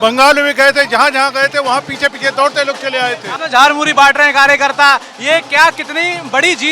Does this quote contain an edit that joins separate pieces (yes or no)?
yes